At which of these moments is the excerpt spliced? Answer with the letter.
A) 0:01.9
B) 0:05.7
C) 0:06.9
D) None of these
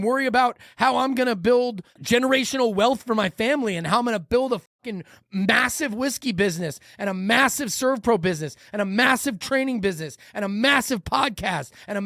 A